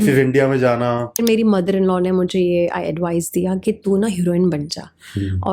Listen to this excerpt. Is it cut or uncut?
cut